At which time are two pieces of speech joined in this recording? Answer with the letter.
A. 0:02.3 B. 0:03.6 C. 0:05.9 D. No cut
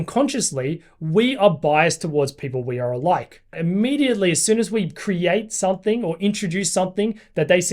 B